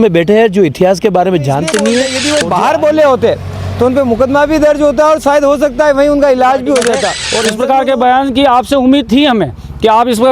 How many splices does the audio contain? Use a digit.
2